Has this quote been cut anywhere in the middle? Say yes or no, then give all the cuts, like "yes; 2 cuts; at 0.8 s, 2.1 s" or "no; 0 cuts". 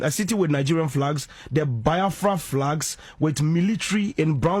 no; 0 cuts